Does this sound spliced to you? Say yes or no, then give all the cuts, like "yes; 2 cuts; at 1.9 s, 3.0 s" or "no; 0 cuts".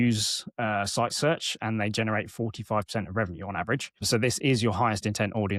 no; 0 cuts